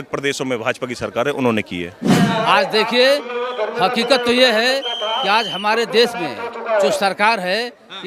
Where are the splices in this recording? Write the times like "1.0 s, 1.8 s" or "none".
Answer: 2.0 s